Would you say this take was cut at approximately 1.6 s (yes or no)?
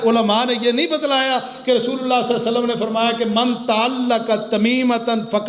no